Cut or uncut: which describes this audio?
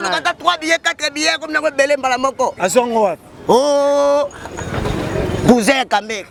uncut